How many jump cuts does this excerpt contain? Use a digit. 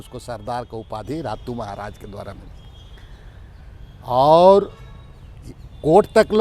0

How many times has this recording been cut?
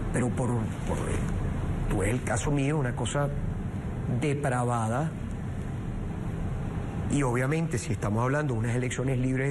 1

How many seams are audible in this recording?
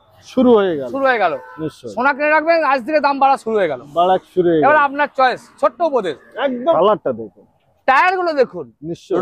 1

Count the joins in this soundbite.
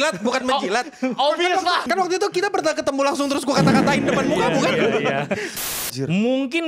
2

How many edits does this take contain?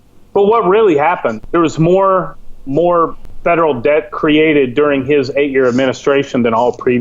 2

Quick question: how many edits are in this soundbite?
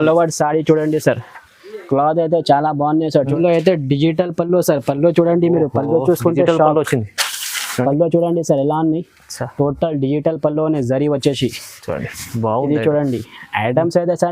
1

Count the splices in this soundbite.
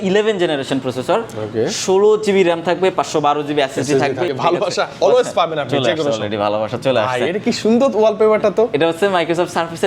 1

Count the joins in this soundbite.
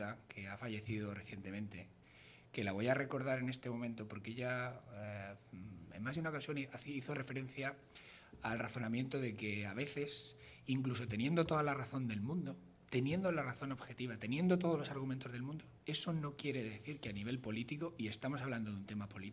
1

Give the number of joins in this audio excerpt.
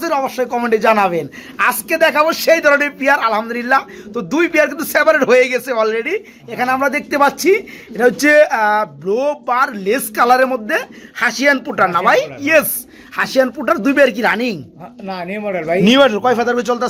0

